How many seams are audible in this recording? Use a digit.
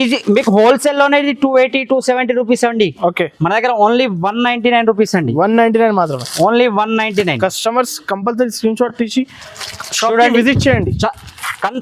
0